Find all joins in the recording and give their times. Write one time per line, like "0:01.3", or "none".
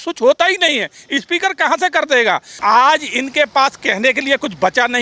0:02.5